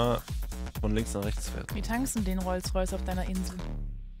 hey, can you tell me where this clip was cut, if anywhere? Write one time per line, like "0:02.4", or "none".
none